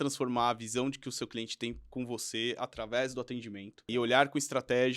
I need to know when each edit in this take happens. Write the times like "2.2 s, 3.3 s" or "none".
3.9 s